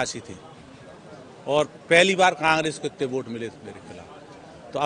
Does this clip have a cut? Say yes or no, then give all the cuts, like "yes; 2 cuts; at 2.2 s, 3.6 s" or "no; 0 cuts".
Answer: no; 0 cuts